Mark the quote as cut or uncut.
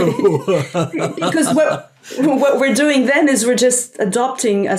uncut